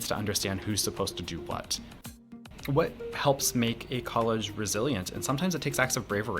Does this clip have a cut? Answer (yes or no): yes